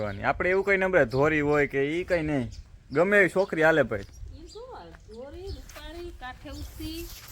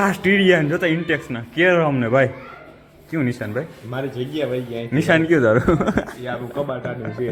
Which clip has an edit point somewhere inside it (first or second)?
first